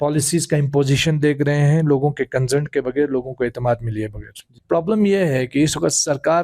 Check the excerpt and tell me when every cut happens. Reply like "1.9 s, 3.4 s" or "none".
4.5 s